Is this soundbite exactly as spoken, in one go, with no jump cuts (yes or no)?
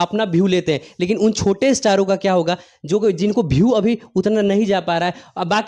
yes